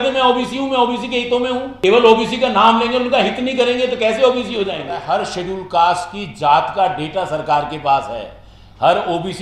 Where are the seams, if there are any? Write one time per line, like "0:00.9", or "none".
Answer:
0:01.7
0:05.0